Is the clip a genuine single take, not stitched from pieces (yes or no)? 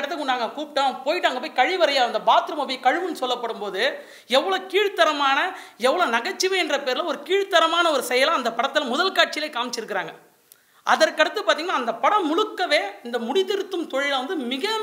yes